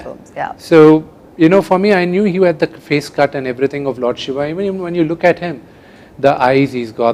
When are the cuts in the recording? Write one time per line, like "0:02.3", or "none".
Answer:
none